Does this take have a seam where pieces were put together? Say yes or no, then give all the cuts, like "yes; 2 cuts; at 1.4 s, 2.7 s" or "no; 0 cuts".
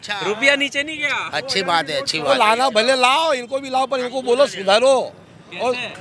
yes; 1 cut; at 2.3 s